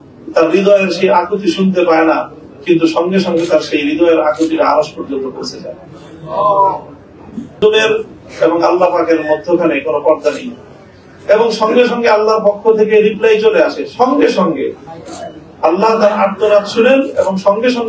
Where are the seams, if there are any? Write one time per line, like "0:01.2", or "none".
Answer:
0:07.6